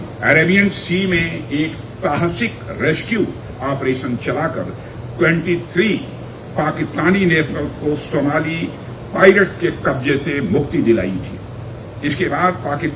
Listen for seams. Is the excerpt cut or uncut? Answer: uncut